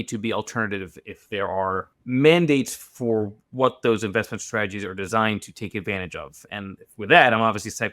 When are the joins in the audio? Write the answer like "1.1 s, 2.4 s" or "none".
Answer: 1.9 s